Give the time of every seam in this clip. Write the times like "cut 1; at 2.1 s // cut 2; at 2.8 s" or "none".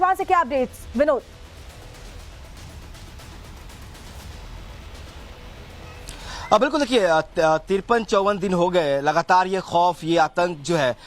cut 1; at 8.9 s

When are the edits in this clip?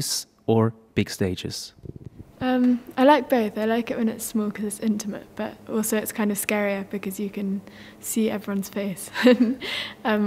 cut 1; at 2.9 s

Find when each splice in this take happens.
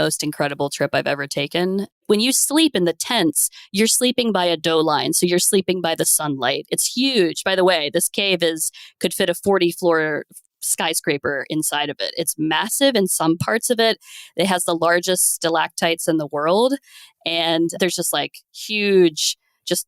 cut 1; at 2.0 s

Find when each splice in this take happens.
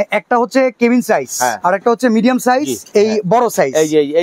cut 1; at 1.6 s // cut 2; at 2.8 s

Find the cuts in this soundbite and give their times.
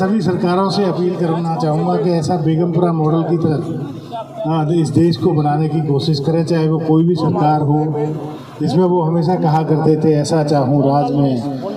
none

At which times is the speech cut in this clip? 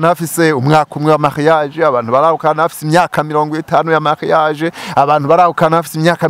none

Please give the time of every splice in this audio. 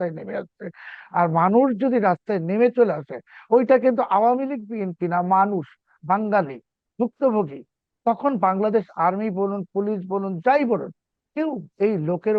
none

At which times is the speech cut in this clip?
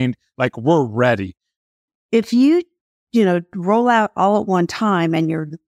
cut 1; at 1.8 s

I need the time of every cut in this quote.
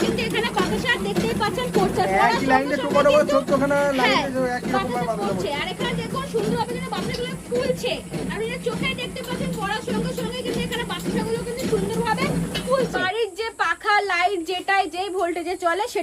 cut 1; at 13.0 s

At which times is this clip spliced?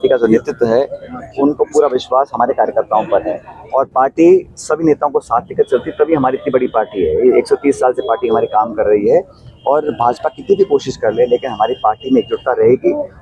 none

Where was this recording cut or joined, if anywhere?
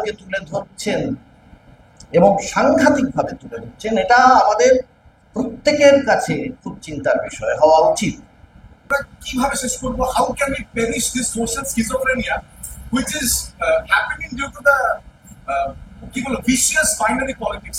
cut 1; at 8.9 s

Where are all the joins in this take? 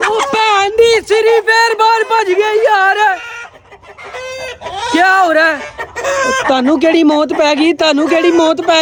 none

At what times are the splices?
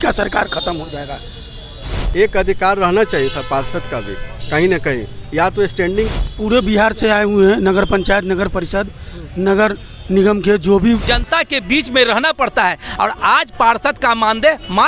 cut 1; at 2.0 s // cut 2; at 6.1 s // cut 3; at 11.1 s

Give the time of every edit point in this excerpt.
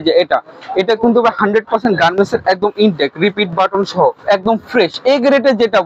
cut 1; at 4.2 s

